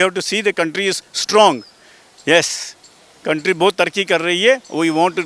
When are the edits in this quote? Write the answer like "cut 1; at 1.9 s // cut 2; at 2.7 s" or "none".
none